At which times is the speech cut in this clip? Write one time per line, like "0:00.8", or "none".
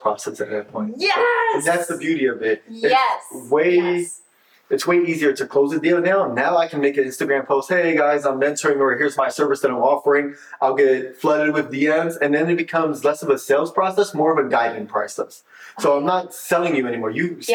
none

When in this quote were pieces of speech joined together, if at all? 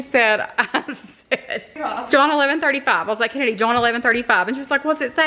0:01.7

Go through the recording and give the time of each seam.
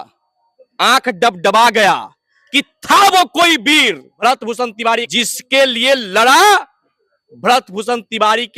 0:04.1
0:05.1

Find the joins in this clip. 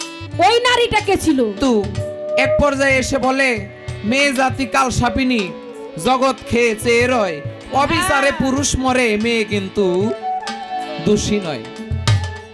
0:01.6

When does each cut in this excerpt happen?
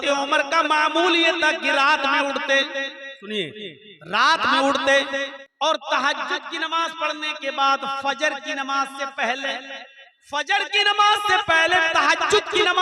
0:05.4

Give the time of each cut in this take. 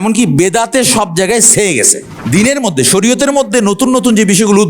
0:02.1

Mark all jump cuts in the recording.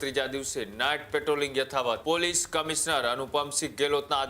0:02.0

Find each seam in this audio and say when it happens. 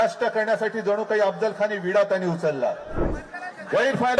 0:03.0

